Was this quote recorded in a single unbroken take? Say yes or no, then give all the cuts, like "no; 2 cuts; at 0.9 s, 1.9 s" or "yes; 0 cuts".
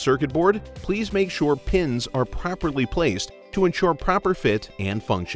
yes; 0 cuts